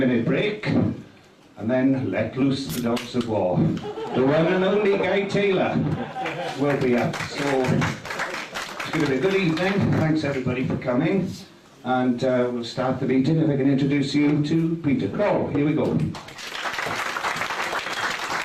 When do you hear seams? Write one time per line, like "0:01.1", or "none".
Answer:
none